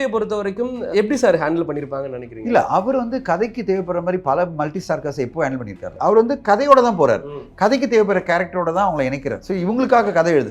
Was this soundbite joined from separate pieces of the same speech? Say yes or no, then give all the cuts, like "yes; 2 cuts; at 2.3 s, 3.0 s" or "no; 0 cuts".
yes; 3 cuts; at 0.9 s, 5.9 s, 9.4 s